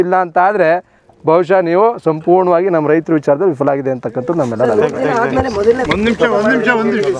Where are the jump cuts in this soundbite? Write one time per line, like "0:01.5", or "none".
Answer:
none